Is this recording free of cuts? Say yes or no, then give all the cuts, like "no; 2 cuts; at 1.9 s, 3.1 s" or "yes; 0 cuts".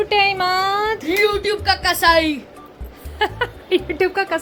yes; 0 cuts